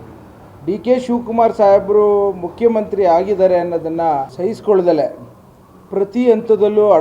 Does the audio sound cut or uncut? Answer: cut